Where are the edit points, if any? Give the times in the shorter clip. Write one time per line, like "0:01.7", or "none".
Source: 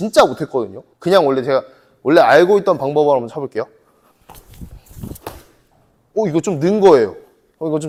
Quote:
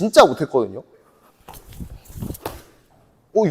0:00.9